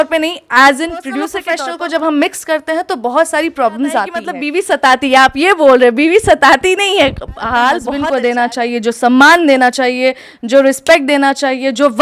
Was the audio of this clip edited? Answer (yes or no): yes